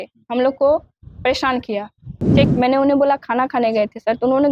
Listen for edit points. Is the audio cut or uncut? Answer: cut